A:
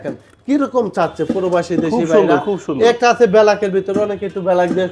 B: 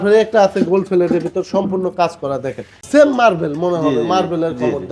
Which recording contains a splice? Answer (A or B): B